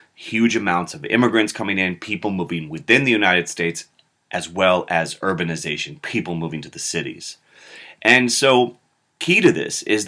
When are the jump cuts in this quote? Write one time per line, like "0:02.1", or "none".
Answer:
none